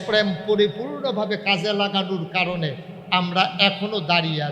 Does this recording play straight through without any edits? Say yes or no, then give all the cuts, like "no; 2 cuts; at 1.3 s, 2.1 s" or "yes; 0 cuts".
yes; 0 cuts